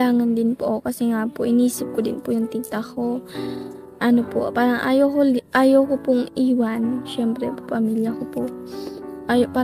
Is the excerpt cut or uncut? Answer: uncut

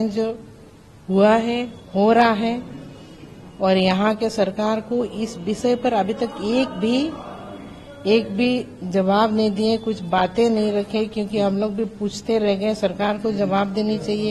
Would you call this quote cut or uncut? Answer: uncut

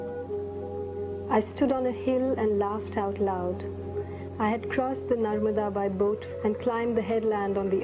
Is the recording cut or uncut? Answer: uncut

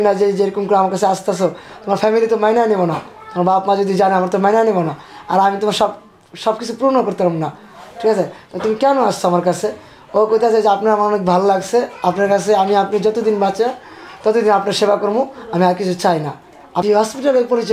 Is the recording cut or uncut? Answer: cut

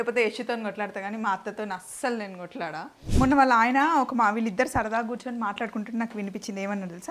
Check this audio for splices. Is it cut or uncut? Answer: cut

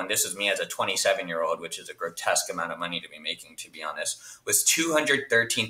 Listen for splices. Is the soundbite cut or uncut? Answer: uncut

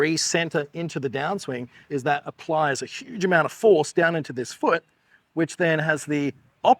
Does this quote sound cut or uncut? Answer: cut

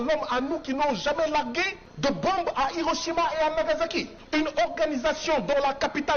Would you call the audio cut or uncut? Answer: cut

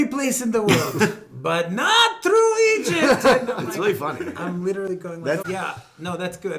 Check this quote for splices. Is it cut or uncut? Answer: cut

